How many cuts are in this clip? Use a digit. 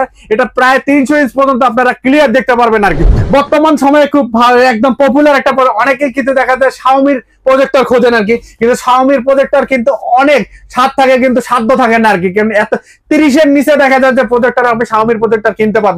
1